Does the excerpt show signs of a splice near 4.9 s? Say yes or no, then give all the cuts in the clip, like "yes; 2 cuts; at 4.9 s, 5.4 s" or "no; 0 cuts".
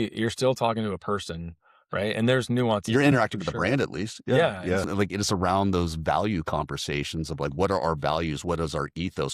yes; 1 cut; at 4.9 s